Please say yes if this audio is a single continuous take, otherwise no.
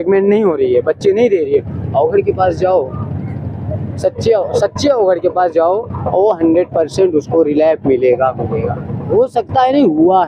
no